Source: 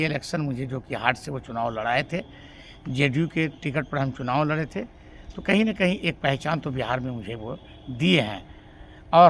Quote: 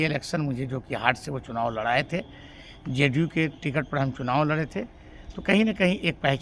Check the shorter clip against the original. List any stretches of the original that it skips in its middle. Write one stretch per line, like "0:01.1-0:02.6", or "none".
none